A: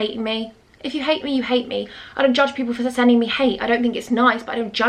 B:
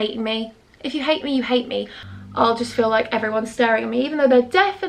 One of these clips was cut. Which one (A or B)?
B